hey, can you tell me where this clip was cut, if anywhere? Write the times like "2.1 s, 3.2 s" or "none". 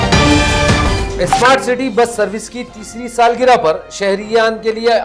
none